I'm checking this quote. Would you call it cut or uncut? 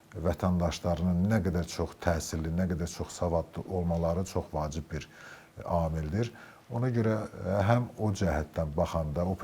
uncut